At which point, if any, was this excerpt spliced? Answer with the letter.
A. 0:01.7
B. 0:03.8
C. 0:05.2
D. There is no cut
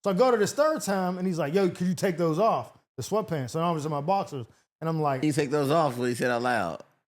C